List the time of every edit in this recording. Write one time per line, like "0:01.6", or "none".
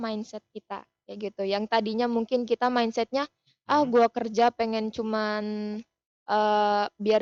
none